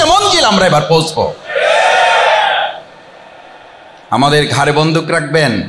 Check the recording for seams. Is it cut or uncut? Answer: uncut